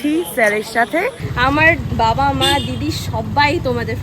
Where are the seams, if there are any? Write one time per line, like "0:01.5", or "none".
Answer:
0:01.2